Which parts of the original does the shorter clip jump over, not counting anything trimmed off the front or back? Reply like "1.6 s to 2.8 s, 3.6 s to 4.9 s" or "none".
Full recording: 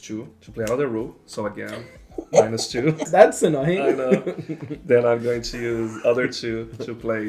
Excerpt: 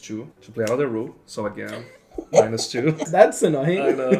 none